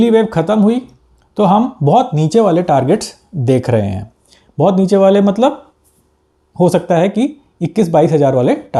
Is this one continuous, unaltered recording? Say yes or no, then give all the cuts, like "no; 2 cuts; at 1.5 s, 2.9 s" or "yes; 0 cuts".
yes; 0 cuts